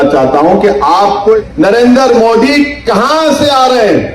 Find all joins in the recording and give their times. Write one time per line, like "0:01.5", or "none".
0:01.4